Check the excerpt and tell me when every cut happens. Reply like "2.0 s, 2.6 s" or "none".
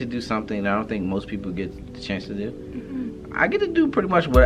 none

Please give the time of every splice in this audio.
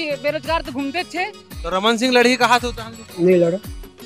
1.4 s

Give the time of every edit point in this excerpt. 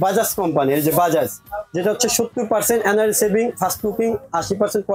none

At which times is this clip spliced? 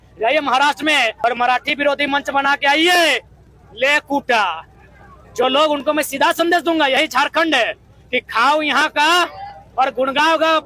1.2 s

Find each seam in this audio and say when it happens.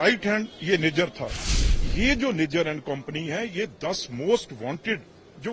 1.5 s

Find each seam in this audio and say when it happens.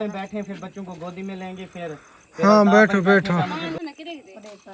3.8 s

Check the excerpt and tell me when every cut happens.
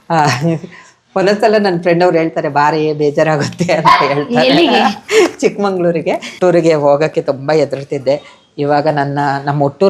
6.3 s

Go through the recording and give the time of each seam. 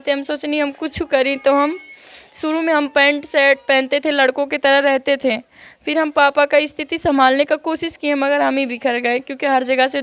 none

